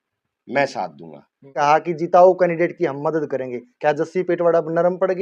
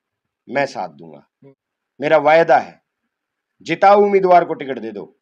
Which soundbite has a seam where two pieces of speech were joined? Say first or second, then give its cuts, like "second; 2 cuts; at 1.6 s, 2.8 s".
first; 1 cut; at 1.4 s